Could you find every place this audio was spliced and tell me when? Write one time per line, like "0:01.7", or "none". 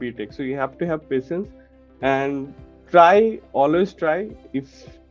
none